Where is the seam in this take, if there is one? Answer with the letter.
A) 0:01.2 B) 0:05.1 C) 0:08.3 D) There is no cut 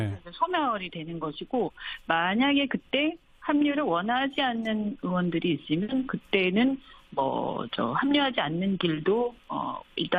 D